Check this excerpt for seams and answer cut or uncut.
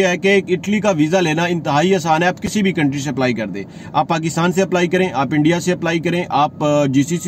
uncut